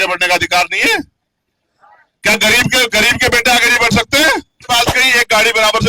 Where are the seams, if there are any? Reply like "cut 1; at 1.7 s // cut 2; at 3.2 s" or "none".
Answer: cut 1; at 4.6 s